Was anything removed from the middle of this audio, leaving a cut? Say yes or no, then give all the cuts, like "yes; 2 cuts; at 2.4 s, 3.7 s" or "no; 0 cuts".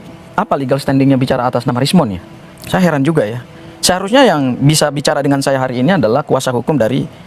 no; 0 cuts